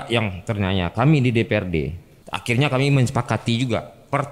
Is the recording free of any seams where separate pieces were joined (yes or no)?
yes